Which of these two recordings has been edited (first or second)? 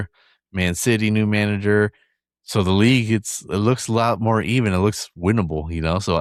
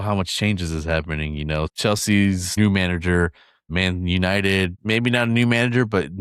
second